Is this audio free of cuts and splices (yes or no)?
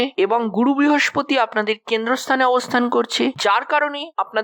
yes